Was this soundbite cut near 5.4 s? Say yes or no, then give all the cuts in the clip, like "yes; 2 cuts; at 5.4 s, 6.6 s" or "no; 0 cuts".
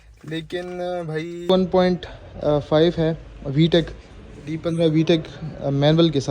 no; 1 cut; at 1.5 s